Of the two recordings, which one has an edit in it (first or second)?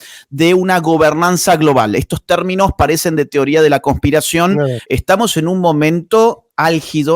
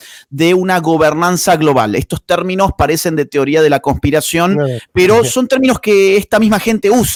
first